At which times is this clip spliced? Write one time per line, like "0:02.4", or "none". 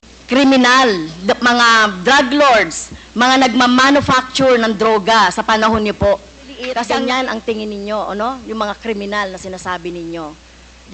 0:06.9